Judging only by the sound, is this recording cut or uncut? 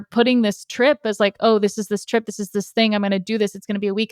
uncut